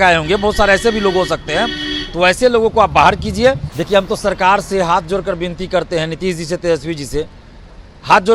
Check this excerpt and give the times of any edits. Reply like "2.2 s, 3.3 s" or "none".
3.7 s